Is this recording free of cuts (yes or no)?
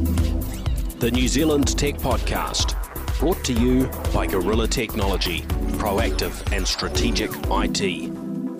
yes